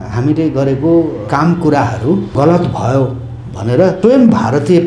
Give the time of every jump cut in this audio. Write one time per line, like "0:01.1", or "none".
0:01.2
0:02.3
0:04.0